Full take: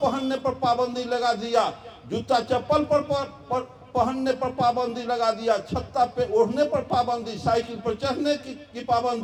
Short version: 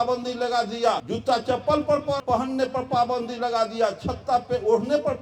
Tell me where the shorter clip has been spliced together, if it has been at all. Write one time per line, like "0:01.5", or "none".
0:01.1
0:02.2